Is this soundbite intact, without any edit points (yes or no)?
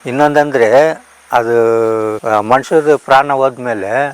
yes